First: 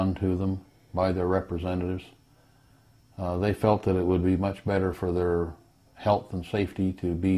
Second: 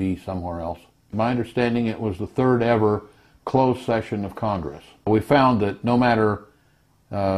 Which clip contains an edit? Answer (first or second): second